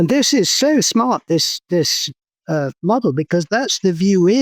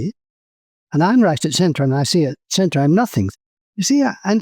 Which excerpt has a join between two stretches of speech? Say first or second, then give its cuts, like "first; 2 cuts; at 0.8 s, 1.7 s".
second; 1 cut; at 3.3 s